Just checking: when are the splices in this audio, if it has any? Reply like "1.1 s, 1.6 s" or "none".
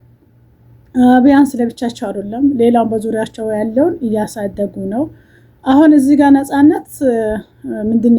none